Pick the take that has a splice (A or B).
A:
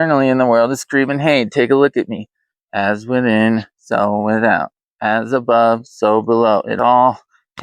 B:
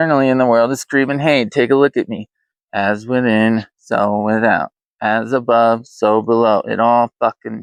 A